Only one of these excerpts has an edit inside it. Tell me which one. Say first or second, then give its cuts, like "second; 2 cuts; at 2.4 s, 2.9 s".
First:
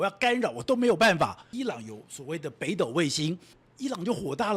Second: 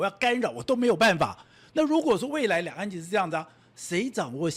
first; 2 cuts; at 1.5 s, 3.6 s